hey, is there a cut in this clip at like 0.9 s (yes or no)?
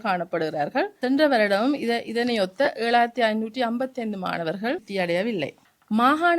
yes